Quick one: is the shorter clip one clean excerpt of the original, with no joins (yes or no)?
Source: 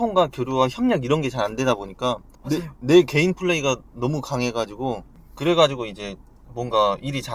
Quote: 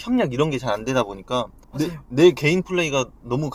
yes